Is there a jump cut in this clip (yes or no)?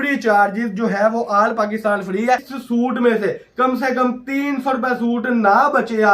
yes